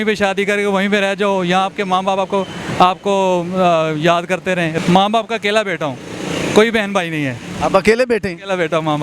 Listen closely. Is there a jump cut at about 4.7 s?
yes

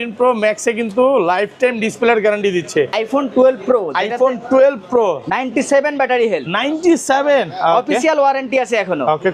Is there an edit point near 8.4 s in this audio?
no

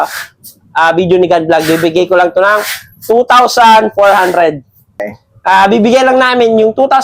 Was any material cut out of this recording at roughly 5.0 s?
yes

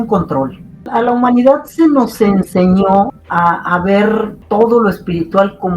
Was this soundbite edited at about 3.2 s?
yes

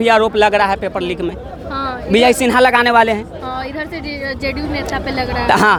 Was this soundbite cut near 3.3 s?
no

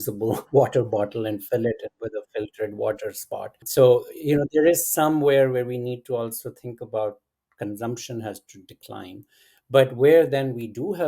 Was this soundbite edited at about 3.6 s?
yes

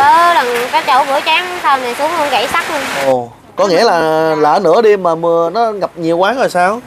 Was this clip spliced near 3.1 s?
yes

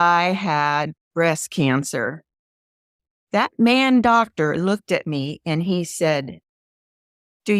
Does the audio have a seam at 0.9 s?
no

